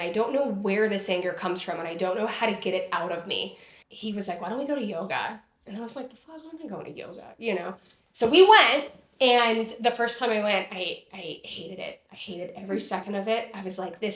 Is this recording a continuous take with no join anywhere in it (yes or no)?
yes